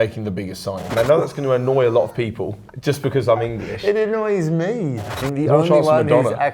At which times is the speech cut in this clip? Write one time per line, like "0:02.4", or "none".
0:00.9
0:05.0